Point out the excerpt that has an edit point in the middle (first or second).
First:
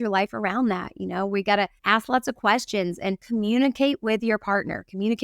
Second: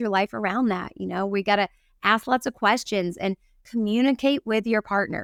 first